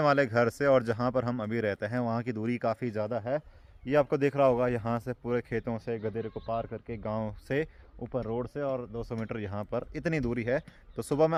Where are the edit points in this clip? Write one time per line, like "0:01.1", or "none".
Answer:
none